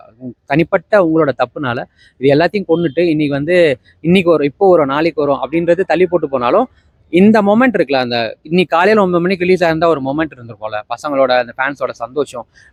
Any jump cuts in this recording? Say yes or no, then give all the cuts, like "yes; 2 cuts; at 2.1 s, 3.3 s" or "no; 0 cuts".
no; 0 cuts